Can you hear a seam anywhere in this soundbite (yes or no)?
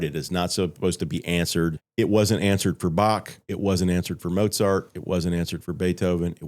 yes